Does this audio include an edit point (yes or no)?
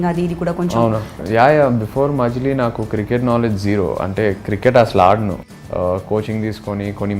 yes